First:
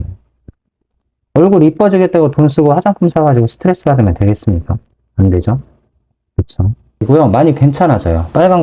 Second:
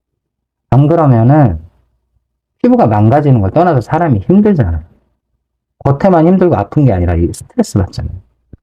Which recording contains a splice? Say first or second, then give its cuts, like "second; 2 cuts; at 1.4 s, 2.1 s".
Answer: first; 1 cut; at 7.0 s